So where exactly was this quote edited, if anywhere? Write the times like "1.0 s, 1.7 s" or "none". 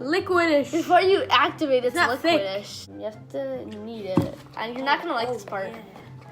2.8 s